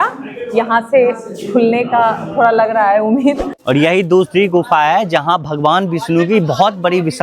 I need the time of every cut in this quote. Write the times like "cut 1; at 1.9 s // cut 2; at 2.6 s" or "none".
cut 1; at 3.5 s